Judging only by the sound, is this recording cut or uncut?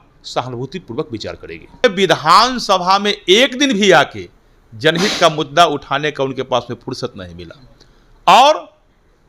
cut